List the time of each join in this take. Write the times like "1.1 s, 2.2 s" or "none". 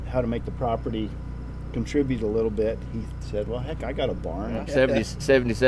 4.6 s